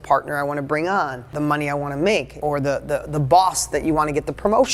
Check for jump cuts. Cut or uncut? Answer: cut